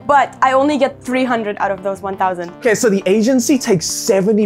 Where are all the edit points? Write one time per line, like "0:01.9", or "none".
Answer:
0:02.6